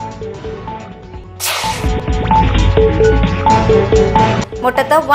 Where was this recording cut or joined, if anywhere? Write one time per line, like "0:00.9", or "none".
none